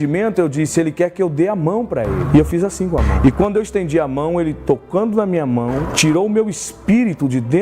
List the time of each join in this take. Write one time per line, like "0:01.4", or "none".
0:02.2
0:03.1
0:05.9